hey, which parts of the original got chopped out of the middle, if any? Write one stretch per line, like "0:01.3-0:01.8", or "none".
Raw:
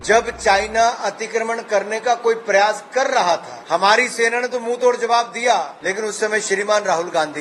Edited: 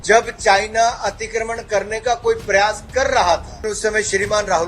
0:03.6-0:05.9